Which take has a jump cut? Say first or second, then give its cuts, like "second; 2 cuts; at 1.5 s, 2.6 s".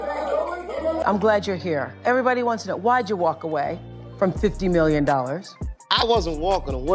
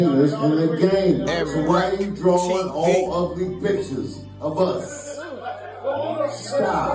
first; 1 cut; at 1.0 s